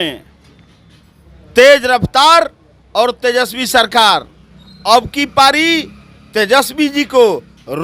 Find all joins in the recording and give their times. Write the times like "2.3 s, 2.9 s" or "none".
none